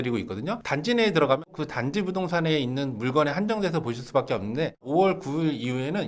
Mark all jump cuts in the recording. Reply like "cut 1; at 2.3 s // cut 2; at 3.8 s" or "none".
cut 1; at 1.5 s // cut 2; at 4.8 s